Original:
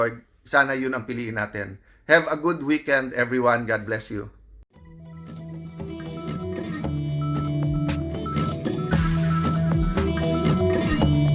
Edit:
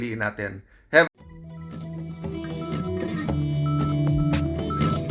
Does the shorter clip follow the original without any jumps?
no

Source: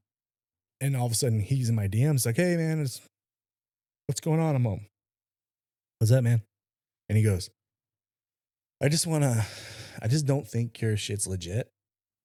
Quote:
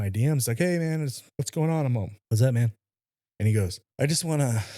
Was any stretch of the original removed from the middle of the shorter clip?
yes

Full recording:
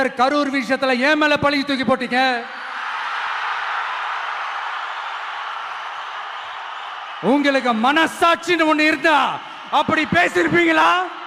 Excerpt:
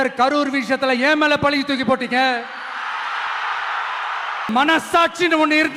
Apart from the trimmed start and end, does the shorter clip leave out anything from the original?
yes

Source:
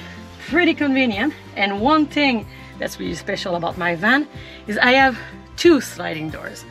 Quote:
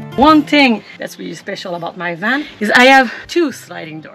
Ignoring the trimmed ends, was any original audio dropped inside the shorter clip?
yes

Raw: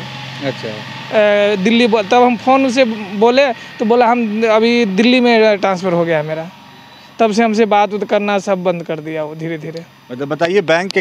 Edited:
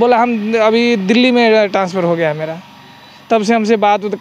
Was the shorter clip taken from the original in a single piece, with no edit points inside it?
yes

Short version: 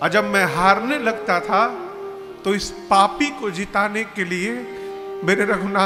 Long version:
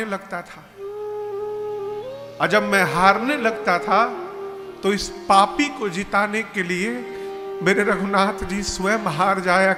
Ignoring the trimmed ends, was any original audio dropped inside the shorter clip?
no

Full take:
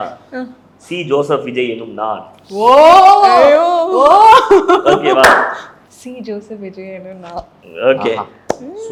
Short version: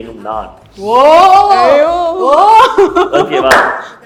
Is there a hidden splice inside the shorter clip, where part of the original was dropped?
no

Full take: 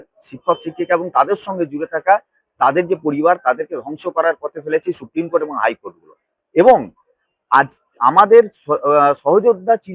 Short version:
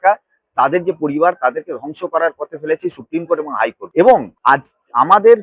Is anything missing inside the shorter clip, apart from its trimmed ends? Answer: yes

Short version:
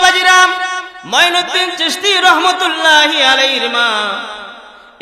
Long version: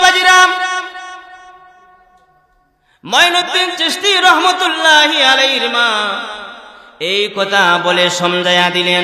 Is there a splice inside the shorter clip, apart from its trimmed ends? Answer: yes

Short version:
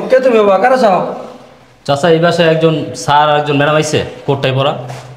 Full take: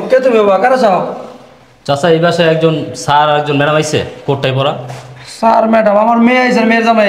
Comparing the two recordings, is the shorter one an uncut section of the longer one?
yes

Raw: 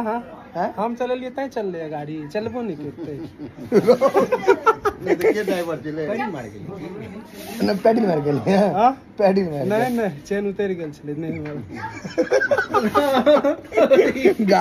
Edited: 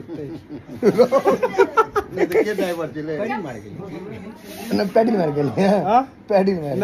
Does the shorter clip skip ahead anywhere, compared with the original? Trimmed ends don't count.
no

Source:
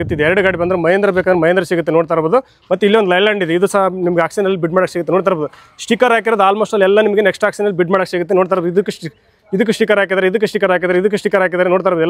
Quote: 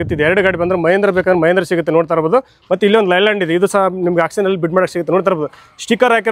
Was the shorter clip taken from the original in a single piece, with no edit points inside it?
yes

